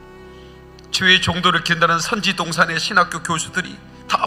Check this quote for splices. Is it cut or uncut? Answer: uncut